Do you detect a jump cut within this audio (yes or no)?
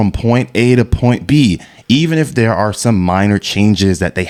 no